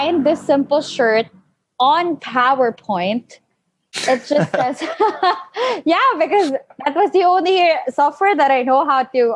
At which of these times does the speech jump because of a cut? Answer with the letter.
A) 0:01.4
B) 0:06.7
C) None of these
C